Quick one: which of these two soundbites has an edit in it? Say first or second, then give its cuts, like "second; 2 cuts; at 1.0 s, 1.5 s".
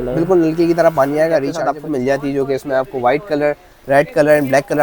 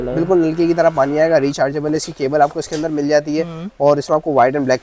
first; 1 cut; at 1.5 s